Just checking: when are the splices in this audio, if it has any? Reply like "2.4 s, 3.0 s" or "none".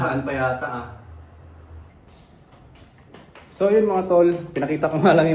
1.9 s